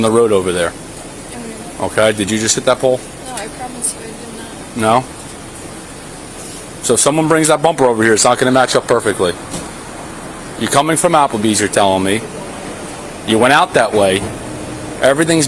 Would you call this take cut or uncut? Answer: uncut